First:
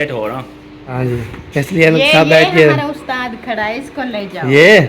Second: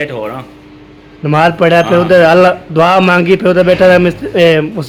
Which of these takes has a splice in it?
first; 1 cut; at 1.0 s

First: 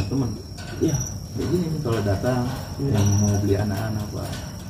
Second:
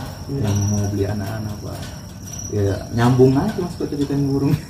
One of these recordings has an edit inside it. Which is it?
first; 1 cut; at 1.4 s

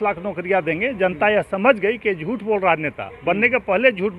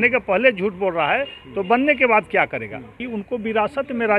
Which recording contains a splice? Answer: second; 1 cut; at 3.0 s

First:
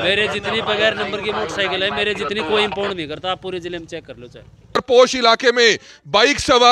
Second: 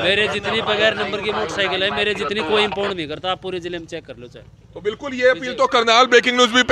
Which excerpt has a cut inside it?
first; 1 cut; at 4.8 s

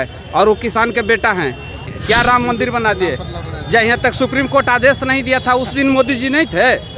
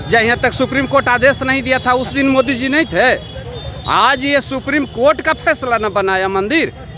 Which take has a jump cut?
first; 1 cut; at 1.9 s

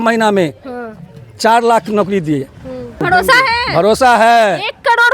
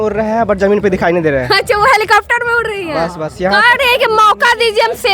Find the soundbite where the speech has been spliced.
first; 1 cut; at 3.0 s

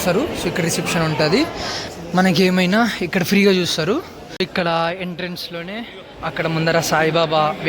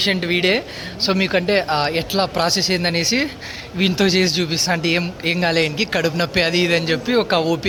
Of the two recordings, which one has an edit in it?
first; 2 cuts; at 1.8 s, 4.4 s

